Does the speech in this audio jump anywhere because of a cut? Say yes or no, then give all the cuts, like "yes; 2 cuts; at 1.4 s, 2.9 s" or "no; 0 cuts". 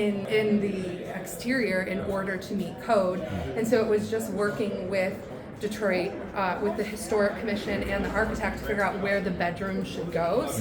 no; 0 cuts